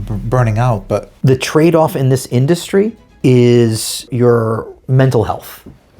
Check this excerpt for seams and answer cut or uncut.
cut